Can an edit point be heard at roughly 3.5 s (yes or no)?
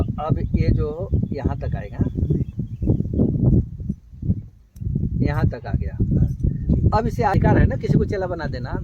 no